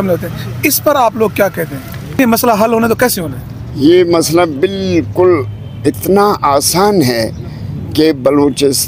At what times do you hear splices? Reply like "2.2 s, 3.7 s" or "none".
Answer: 2.2 s